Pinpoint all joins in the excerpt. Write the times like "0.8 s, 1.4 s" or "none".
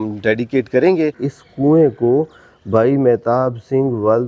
1.3 s